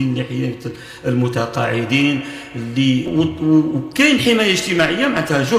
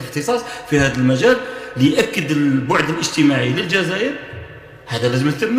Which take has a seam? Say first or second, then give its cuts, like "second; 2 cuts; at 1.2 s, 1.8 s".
first; 1 cut; at 3.1 s